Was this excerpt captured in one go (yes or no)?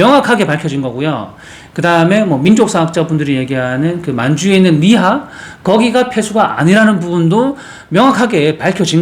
yes